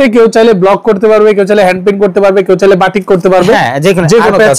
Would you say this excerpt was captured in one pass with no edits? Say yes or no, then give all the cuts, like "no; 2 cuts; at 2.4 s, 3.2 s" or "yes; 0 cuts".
yes; 0 cuts